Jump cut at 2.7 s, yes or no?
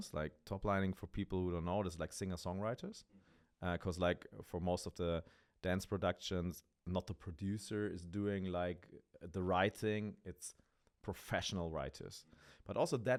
no